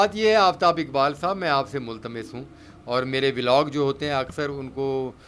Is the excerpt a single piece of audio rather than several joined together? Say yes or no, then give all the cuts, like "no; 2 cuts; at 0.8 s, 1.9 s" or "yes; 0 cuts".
yes; 0 cuts